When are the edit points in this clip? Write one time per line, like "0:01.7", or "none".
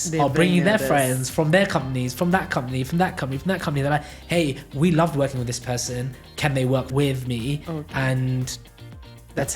0:06.9